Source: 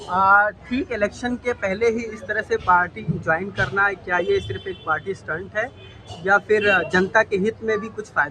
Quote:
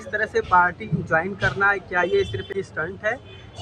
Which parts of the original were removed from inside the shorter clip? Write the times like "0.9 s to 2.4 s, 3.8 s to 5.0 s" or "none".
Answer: 4.7 s to 5.0 s